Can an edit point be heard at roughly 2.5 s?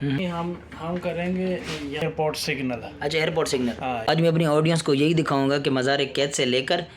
no; 1 cut; at 4.1 s

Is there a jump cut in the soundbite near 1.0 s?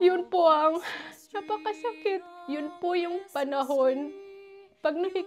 no; 1 cut; at 2.3 s

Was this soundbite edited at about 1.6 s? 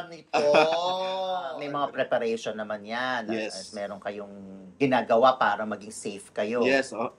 yes; 1 cut; at 1.6 s

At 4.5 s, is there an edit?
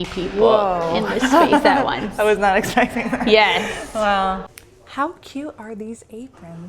yes; 1 cut; at 4.5 s

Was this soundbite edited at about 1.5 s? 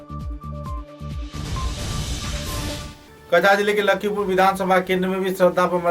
no; 1 cut; at 2.9 s

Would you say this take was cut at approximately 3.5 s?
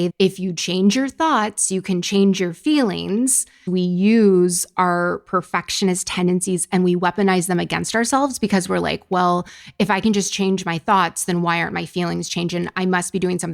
yes; 1 cut; at 3.5 s

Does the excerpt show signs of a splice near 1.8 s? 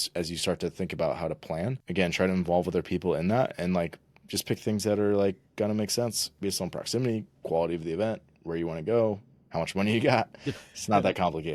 yes; 2 cuts; at 1.8 s, 6.3 s

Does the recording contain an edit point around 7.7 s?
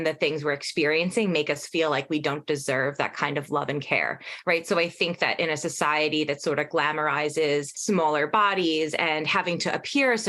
yes; 1 cut; at 7.7 s

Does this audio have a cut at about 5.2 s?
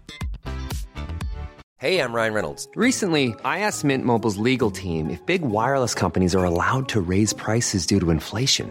no; 1 cut; at 1.6 s

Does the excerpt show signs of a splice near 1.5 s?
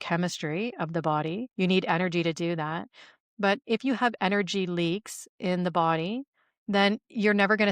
yes; 1 cut; at 1.5 s

